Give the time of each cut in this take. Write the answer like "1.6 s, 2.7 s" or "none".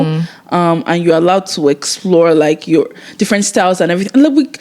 none